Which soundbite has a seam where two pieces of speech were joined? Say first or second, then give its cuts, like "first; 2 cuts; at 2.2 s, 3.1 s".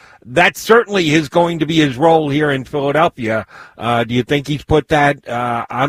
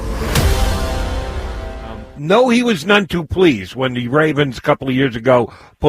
second; 1 cut; at 2.1 s